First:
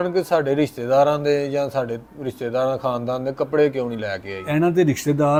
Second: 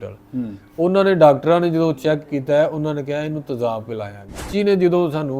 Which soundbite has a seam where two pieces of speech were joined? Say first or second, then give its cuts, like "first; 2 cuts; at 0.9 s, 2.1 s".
second; 1 cut; at 4.5 s